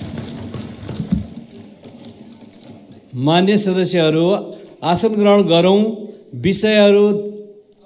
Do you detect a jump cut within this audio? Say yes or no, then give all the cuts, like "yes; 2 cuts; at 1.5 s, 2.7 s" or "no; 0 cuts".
no; 0 cuts